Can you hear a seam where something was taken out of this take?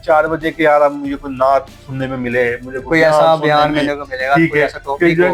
no; 0 cuts

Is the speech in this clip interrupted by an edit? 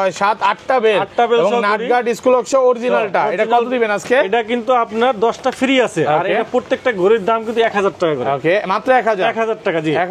no; 0 cuts

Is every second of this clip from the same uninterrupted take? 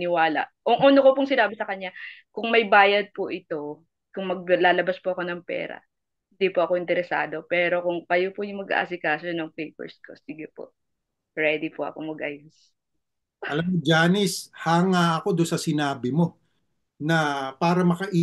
yes; 0 cuts

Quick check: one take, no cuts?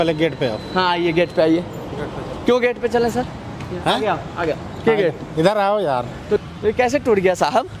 no; 1 cut; at 6.4 s

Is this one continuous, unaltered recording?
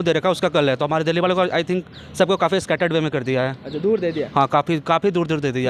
yes; 0 cuts

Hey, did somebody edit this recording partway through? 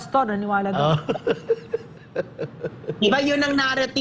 no; 0 cuts

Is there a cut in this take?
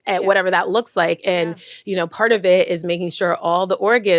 no; 0 cuts

